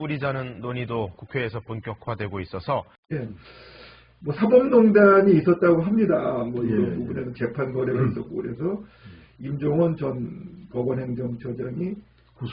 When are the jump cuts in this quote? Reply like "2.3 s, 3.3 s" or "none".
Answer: 3.0 s